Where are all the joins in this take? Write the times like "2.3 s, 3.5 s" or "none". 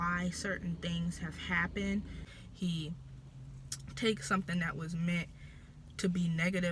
2.2 s